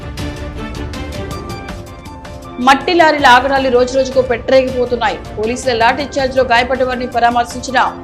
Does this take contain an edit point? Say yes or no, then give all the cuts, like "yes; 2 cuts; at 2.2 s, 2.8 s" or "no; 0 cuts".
yes; 1 cut; at 2.4 s